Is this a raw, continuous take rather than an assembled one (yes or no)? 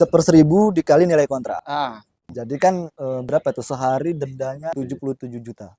yes